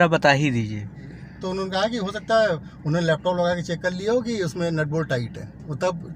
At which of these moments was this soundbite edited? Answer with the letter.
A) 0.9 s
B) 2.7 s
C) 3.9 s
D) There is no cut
A